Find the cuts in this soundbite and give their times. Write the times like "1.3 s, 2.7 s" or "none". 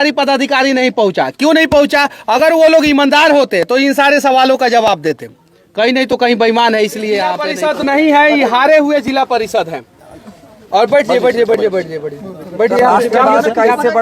7.5 s